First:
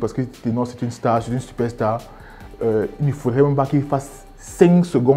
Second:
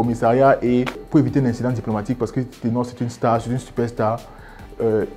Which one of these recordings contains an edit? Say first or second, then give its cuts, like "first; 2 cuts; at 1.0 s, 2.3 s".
second; 1 cut; at 1.0 s